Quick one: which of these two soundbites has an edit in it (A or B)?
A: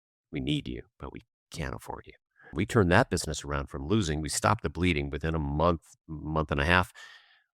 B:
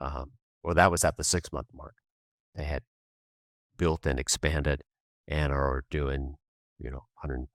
A